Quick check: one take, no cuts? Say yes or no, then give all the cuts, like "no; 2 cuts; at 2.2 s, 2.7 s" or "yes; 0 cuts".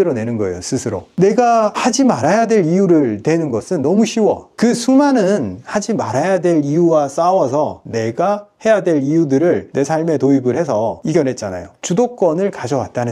no; 1 cut; at 4.5 s